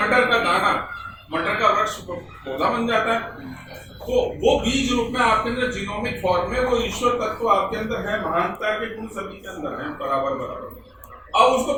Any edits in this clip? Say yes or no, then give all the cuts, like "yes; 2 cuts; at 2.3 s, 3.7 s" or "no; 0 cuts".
no; 0 cuts